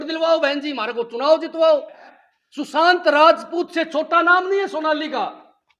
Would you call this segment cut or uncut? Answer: cut